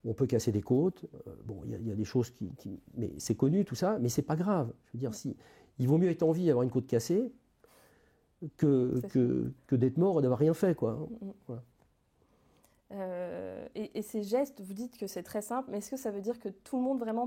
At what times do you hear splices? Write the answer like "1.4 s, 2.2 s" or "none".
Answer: none